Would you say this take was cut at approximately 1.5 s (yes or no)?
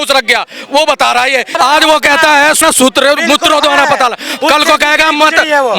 yes